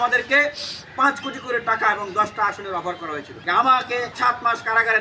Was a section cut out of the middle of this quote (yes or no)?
yes